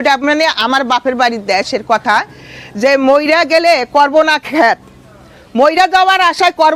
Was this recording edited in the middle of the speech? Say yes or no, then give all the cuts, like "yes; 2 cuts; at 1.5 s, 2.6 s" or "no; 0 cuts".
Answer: no; 0 cuts